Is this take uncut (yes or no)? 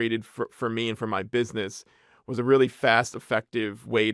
yes